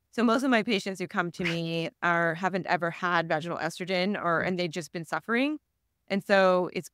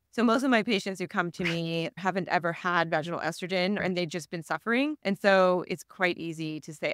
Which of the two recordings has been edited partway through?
second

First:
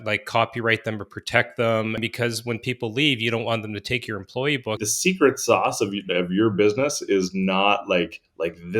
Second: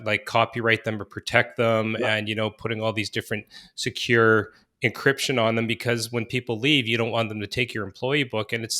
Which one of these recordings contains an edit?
first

